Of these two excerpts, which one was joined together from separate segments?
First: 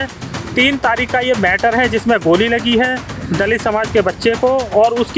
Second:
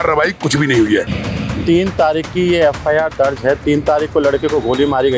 second; 1 cut; at 1.2 s

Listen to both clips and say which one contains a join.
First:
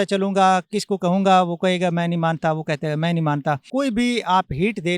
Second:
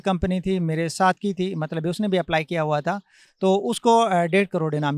first; 1 cut; at 3.6 s

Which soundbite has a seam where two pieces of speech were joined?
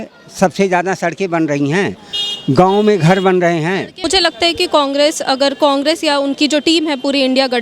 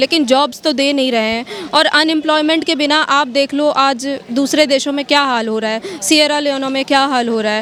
first; 1 cut; at 3.9 s

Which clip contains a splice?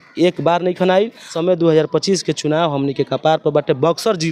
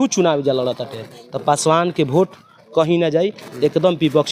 first; 1 cut; at 1.3 s

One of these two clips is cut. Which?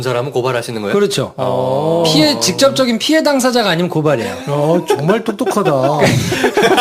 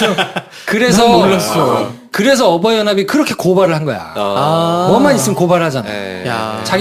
first; 1 cut; at 4.6 s

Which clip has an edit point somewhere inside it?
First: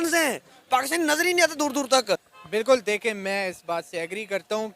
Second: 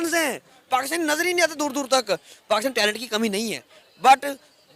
first; 1 cut; at 2.3 s

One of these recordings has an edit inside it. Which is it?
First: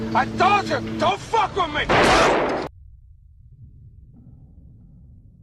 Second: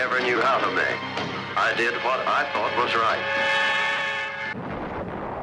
second; 1 cut; at 1.4 s

